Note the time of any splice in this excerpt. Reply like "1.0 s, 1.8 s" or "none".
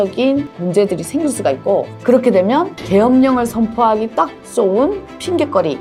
none